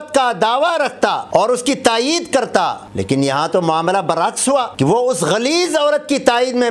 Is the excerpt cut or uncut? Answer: cut